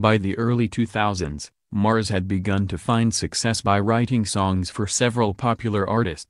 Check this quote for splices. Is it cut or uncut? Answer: uncut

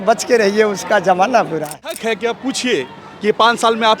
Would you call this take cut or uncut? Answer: cut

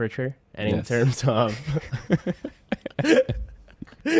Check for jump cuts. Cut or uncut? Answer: uncut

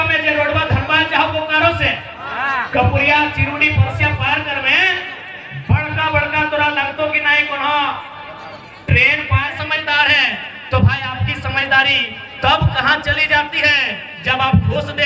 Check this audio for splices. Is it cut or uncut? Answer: cut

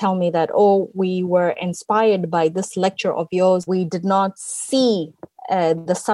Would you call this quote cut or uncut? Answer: cut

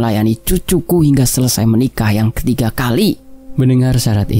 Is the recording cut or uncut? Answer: uncut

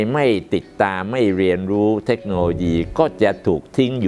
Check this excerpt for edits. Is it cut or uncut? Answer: uncut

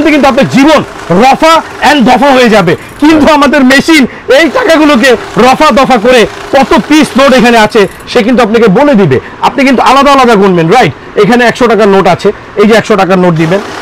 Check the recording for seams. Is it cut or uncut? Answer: uncut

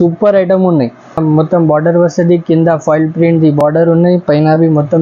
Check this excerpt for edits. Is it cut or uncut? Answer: cut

